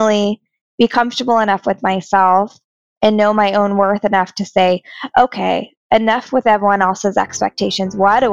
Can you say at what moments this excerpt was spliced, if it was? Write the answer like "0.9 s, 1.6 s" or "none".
none